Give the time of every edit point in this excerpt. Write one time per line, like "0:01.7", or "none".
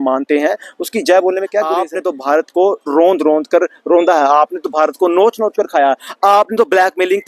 0:01.9